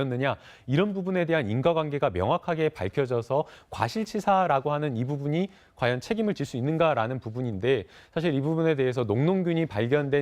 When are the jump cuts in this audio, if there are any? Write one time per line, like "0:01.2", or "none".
0:03.5